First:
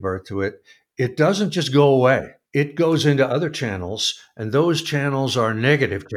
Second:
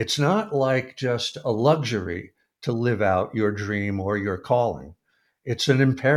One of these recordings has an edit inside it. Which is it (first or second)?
first